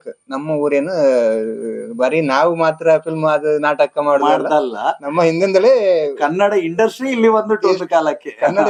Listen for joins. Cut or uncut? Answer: uncut